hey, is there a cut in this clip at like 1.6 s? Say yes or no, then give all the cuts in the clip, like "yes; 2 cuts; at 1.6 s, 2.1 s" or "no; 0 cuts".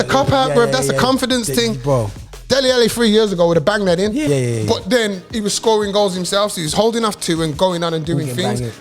no; 1 cut; at 4.2 s